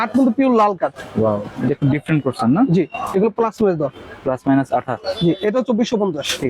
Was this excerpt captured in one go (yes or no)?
yes